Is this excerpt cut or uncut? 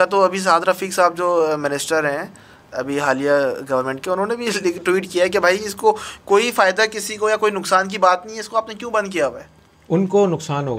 uncut